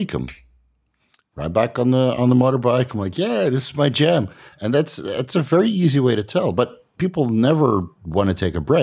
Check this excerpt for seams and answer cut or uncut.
uncut